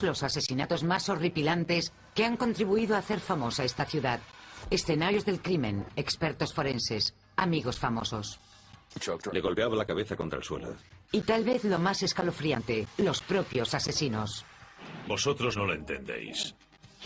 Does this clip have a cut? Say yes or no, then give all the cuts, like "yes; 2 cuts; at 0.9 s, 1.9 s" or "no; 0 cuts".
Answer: no; 0 cuts